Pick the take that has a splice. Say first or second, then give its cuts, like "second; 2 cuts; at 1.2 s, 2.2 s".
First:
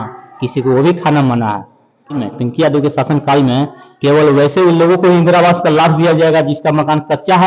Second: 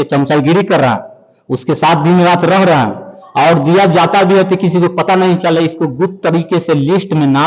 first; 1 cut; at 2.2 s